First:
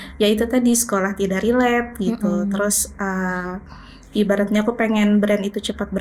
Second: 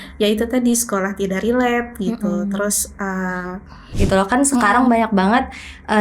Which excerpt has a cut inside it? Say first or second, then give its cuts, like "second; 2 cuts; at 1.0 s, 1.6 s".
second; 1 cut; at 3.9 s